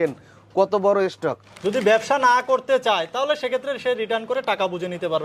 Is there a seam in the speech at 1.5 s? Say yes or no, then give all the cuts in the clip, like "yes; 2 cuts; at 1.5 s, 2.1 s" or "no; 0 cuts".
yes; 1 cut; at 1.5 s